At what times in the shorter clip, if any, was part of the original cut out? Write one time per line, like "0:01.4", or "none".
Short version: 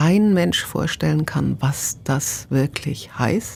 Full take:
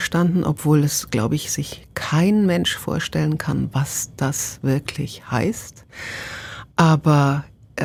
none